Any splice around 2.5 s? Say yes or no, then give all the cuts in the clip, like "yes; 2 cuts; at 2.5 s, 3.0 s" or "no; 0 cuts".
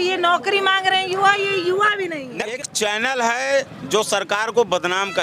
yes; 1 cut; at 2.5 s